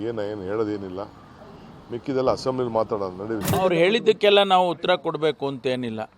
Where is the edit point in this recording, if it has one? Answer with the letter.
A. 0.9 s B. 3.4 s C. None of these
B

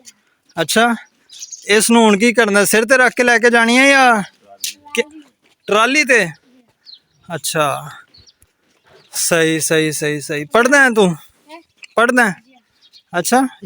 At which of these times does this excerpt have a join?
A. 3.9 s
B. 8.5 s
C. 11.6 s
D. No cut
D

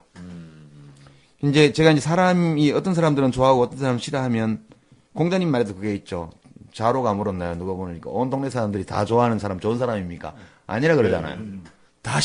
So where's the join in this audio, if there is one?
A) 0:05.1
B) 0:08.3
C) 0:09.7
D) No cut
A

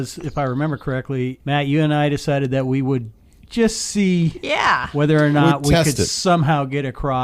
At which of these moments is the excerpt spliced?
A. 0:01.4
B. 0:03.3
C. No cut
A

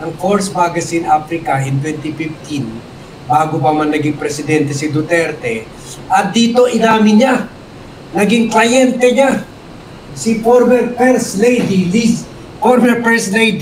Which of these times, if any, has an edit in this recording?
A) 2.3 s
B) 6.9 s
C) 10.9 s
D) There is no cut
D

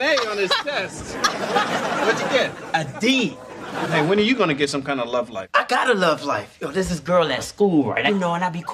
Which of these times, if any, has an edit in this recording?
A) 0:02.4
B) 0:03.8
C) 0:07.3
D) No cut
B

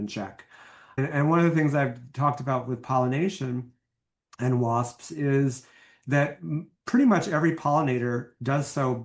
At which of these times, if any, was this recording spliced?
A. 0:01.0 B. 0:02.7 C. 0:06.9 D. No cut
A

